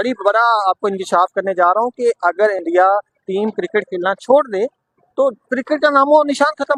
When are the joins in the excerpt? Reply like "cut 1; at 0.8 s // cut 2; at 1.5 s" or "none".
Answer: none